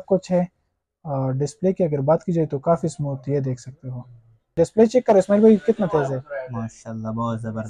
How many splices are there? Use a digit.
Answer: 1